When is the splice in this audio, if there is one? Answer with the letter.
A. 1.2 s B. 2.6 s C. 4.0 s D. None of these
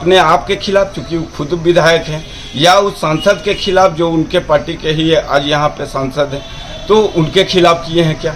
D